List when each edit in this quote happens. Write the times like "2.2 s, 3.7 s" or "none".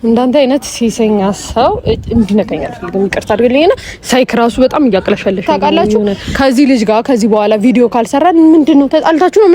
6.2 s

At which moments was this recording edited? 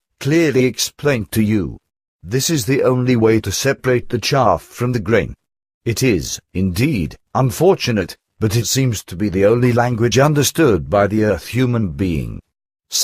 7.9 s

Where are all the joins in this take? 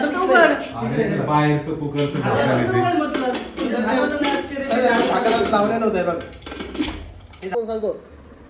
7.5 s

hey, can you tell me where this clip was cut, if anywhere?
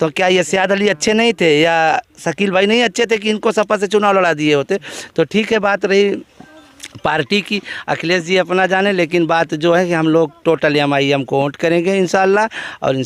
none

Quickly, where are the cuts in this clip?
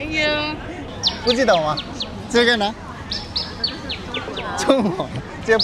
0.9 s

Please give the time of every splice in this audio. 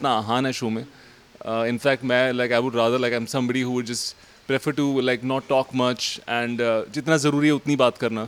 none

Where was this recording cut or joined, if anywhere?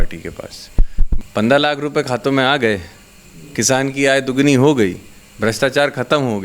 1.1 s

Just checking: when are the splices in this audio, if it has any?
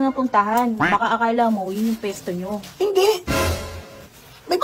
none

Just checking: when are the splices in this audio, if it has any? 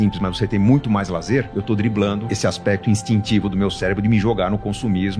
1.5 s, 2.3 s

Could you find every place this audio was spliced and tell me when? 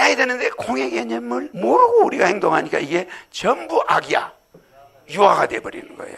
none

